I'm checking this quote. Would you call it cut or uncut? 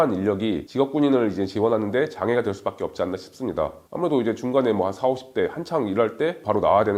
uncut